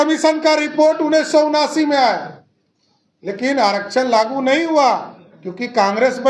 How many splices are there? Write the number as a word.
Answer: zero